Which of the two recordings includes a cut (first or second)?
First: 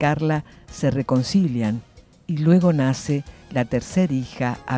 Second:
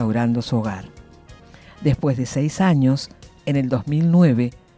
second